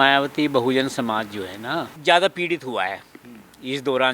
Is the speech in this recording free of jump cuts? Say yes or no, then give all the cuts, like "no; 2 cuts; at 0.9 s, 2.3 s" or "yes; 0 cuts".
no; 1 cut; at 1.9 s